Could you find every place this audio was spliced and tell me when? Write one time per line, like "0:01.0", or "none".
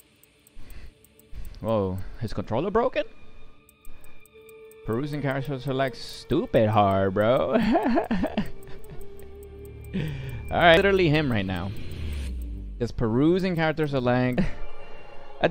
0:10.8
0:14.3